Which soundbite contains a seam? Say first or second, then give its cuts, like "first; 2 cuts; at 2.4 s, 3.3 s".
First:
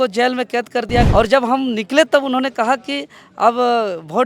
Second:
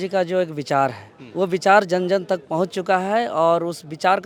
first; 1 cut; at 1.1 s